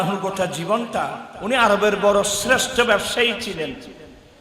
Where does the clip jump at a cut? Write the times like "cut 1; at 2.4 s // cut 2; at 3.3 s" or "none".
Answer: cut 1; at 1.3 s